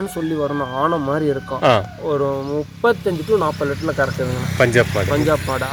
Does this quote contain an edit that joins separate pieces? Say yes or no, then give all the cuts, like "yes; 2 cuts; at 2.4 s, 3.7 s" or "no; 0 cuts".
no; 0 cuts